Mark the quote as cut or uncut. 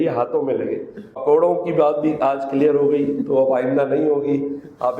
cut